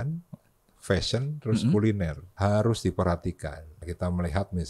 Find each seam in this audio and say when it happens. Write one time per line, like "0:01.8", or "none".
0:02.2
0:03.8

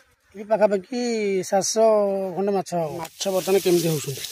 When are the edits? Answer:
0:03.1

